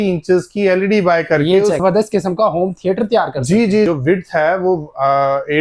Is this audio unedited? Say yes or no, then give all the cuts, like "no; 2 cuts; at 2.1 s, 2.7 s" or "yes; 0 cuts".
no; 2 cuts; at 1.8 s, 3.9 s